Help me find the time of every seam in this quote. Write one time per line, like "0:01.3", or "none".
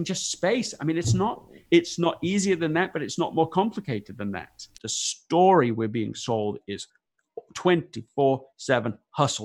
0:01.5
0:04.8